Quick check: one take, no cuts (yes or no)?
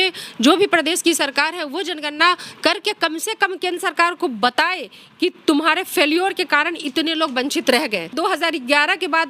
no